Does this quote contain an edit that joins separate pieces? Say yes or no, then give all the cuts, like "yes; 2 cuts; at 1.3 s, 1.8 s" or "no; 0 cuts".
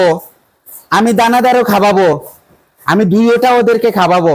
no; 0 cuts